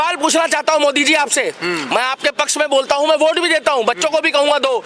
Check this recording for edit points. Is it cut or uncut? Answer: uncut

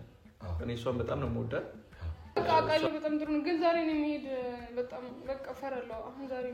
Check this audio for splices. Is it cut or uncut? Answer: cut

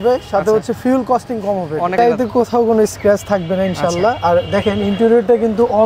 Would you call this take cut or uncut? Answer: cut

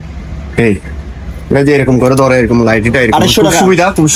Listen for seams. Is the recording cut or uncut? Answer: uncut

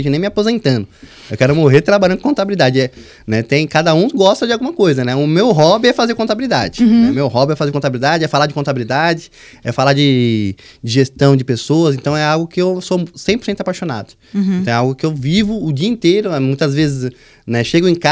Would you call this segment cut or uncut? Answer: uncut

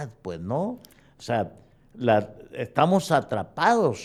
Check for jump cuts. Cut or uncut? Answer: uncut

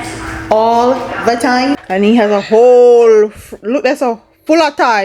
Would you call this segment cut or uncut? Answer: cut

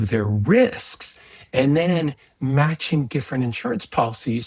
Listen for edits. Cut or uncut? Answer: uncut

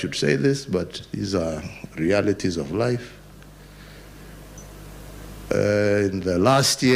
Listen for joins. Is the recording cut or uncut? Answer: uncut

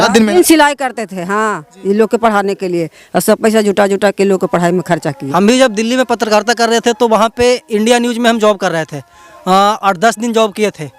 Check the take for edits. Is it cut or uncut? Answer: cut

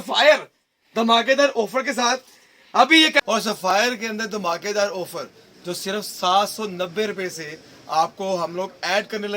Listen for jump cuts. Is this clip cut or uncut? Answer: cut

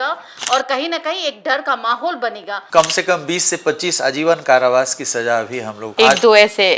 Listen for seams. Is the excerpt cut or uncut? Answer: cut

